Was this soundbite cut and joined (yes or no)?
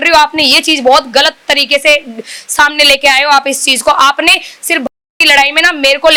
no